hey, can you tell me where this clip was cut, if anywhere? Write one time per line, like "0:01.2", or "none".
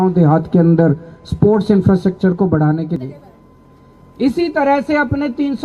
0:03.0